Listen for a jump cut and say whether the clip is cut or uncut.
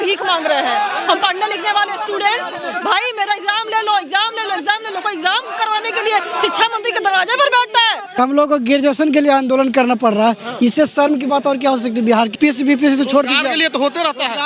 cut